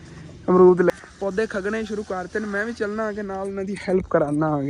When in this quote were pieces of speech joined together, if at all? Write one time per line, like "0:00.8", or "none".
0:01.0